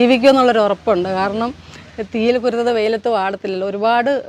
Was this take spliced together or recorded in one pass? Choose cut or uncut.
uncut